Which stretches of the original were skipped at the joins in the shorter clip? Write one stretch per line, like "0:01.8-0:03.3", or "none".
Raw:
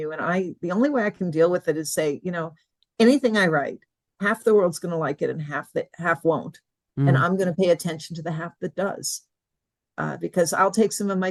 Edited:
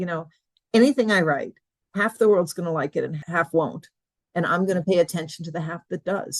0:05.5-0:05.9

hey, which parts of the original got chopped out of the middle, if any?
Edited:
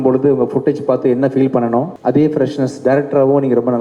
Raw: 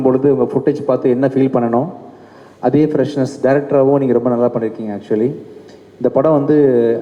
0:01.9-0:02.5

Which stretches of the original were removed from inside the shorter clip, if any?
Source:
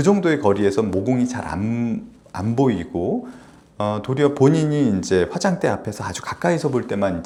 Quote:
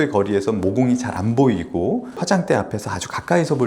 0:01.4-0:02.3
0:03.4-0:05.3

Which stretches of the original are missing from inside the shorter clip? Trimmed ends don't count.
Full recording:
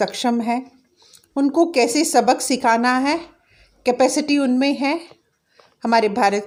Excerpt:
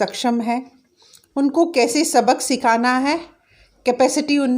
none

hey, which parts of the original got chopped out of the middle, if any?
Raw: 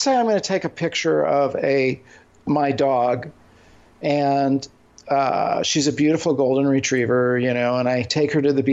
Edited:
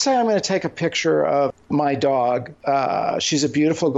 0:01.5-0:02.3
0:03.3-0:05.0

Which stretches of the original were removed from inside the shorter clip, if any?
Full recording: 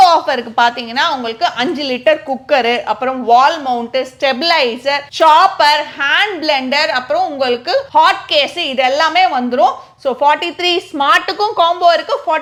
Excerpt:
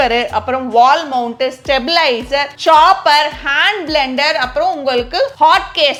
none

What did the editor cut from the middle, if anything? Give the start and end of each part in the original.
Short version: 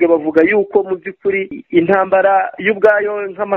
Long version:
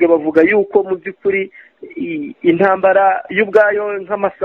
0:01.6-0:02.3

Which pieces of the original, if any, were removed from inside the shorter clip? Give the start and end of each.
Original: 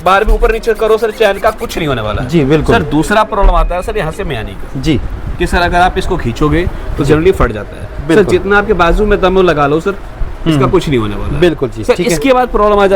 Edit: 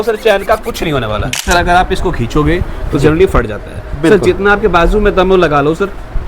0:02.3-0:05.4

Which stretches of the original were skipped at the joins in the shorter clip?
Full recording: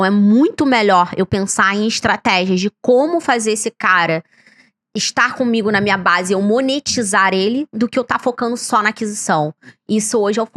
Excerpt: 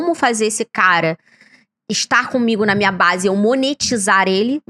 none

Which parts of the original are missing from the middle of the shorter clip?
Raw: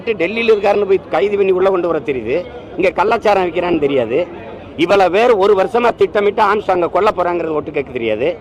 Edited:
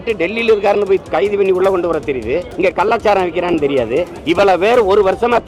0:02.5-0:02.7
0:04.3-0:04.7

